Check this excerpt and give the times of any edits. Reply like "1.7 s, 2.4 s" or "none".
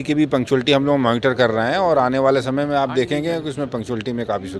none